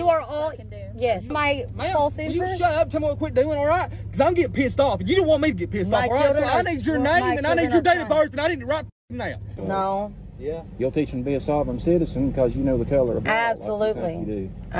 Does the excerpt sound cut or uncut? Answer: cut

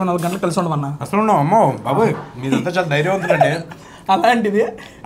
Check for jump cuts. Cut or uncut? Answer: uncut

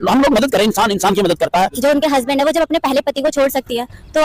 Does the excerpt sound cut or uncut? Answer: cut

